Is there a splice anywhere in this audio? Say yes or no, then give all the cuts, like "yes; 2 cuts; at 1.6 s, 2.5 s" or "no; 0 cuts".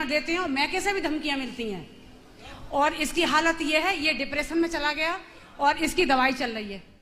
no; 0 cuts